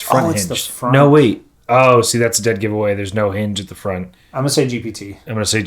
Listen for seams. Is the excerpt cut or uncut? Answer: cut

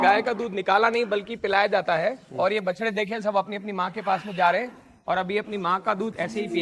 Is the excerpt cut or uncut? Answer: uncut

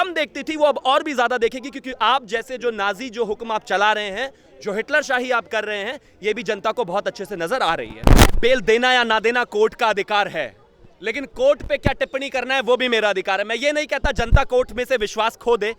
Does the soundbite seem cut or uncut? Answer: cut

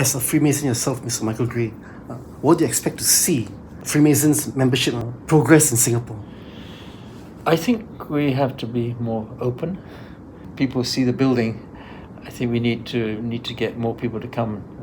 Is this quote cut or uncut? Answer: cut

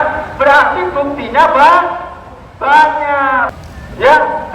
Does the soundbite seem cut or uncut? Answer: cut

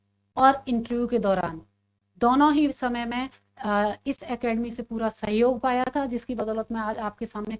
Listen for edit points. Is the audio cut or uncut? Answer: uncut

